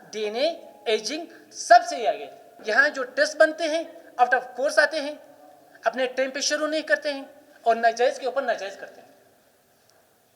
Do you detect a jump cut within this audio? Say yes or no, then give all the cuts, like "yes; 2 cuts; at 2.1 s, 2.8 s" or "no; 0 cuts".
yes; 1 cut; at 2.5 s